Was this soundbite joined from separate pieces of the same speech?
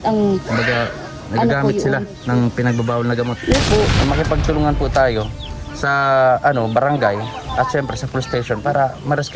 yes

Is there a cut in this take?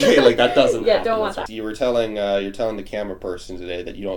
yes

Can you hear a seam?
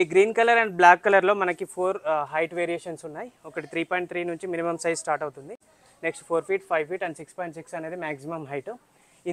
no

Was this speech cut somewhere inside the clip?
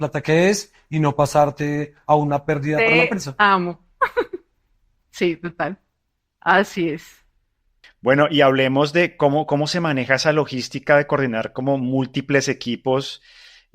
no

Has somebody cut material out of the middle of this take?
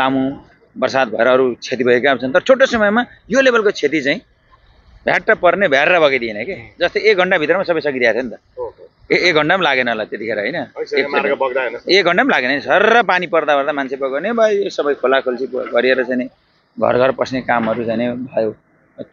no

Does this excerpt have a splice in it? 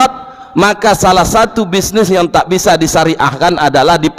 no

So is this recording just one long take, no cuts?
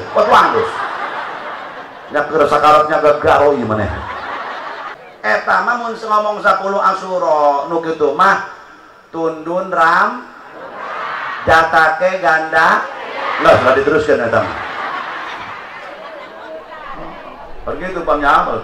no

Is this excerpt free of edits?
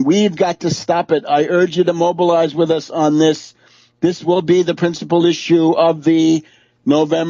yes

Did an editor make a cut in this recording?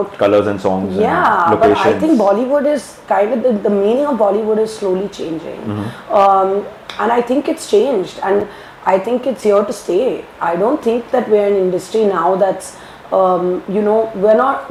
no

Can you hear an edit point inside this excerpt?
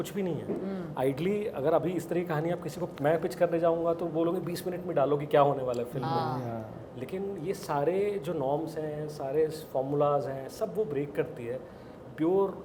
no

